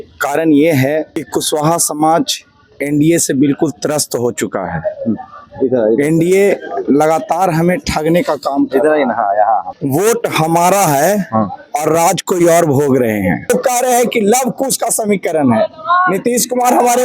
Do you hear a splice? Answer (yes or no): yes